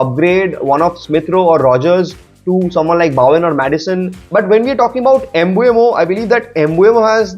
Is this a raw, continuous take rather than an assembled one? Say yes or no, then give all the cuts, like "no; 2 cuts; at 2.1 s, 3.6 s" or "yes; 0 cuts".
no; 1 cut; at 4.2 s